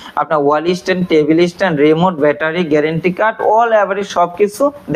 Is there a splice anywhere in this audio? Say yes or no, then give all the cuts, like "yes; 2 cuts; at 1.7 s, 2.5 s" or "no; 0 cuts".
no; 0 cuts